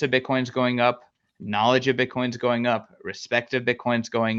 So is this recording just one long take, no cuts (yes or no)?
yes